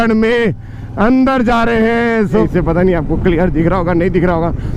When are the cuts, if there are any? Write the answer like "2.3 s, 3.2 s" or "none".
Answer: 2.4 s